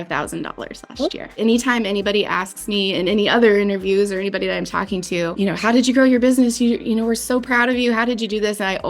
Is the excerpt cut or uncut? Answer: cut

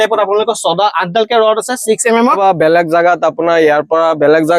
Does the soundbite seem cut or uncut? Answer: cut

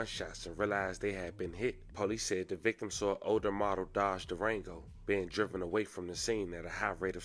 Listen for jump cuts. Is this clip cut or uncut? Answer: uncut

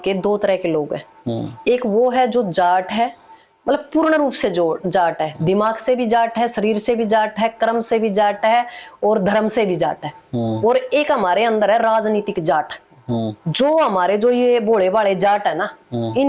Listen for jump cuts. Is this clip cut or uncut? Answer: uncut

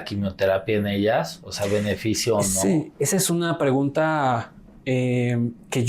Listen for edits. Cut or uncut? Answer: uncut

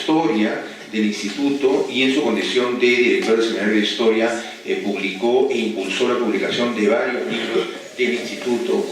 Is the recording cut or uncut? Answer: cut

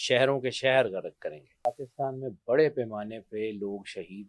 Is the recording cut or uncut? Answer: cut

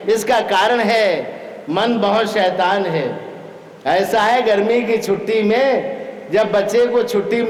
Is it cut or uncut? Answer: uncut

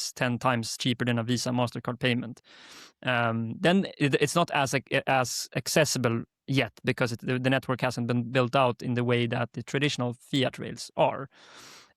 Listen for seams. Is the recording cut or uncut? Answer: uncut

